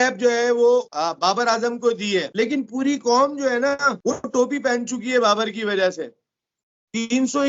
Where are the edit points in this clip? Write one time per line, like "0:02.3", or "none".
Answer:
0:00.9
0:02.3
0:04.0